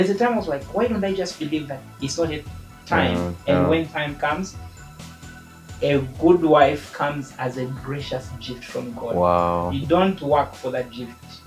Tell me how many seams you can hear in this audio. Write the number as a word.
zero